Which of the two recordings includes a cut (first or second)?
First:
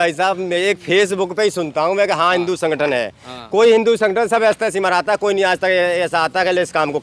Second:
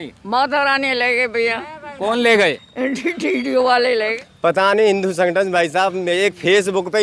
second